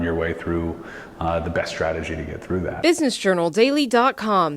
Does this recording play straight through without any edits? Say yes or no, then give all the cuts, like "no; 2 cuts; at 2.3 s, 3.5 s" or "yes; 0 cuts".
no; 1 cut; at 2.8 s